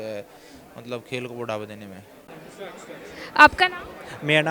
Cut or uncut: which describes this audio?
uncut